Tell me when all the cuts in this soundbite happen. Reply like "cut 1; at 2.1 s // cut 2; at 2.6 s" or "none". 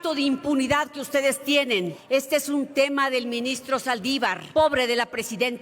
cut 1; at 2.0 s // cut 2; at 4.4 s